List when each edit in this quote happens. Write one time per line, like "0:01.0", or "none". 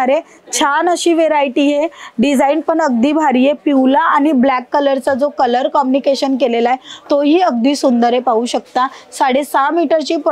none